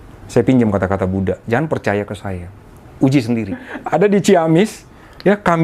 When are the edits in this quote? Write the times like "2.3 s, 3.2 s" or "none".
3.7 s